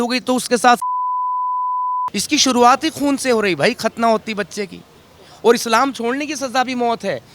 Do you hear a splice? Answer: yes; 1 cut; at 2.1 s

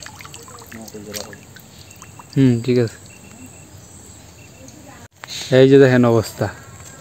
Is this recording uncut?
no; 1 cut; at 5.1 s

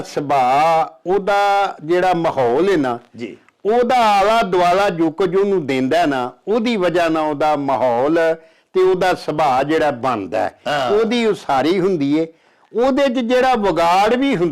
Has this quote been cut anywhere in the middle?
no; 0 cuts

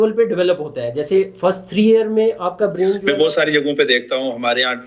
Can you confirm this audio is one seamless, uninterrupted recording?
no; 1 cut; at 3.0 s

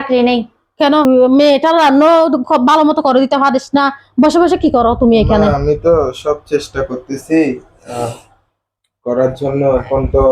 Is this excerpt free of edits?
no; 1 cut; at 1.0 s

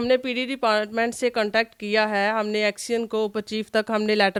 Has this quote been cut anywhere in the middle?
no; 0 cuts

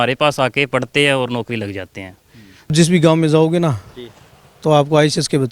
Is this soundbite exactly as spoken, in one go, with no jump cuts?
no; 1 cut; at 2.7 s

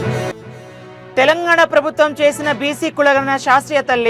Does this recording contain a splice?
yes; 1 cut; at 1.2 s

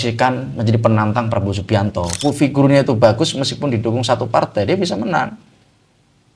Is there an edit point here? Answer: yes; 1 cut; at 2.1 s

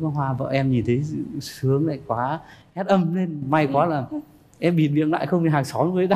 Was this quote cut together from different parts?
no; 0 cuts

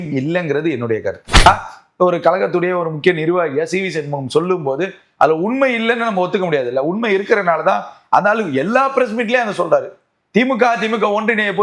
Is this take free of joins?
no; 1 cut; at 1.4 s

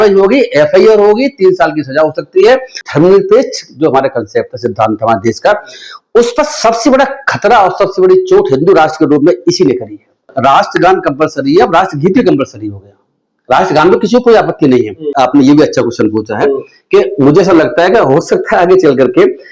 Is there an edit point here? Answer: yes; 3 cuts; at 2.8 s, 10.2 s, 15.0 s

